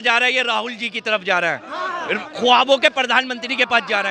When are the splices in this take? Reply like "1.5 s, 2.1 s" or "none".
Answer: none